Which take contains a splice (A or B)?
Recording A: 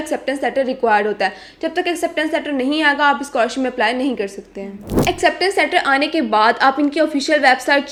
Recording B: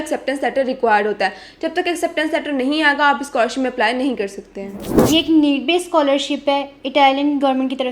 B